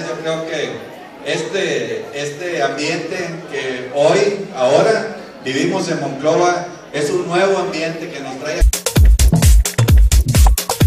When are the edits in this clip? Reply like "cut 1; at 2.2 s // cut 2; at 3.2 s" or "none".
none